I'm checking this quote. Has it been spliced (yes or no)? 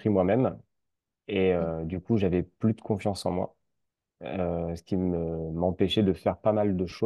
no